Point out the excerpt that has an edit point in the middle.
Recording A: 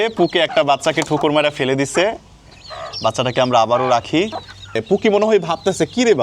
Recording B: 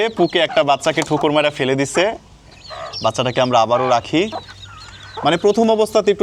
A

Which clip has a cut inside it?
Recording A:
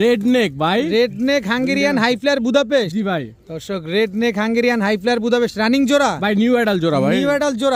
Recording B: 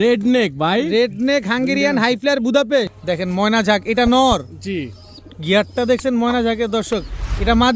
B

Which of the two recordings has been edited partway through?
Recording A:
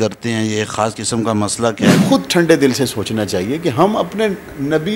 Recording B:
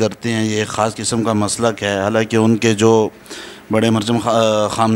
A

